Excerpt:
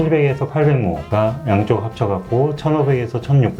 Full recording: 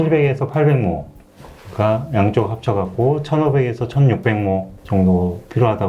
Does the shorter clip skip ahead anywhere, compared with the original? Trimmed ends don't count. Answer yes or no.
yes